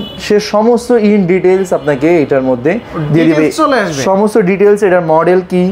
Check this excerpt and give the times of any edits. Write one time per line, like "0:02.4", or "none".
none